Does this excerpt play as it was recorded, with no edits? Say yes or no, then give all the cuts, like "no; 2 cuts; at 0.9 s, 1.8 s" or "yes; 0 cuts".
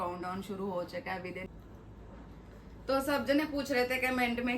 no; 1 cut; at 1.4 s